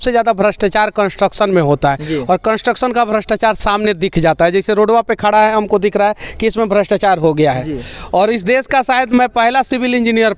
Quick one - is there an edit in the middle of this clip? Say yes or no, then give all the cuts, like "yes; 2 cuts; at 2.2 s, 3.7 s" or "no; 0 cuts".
no; 0 cuts